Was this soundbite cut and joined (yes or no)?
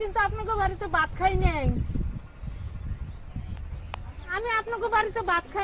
no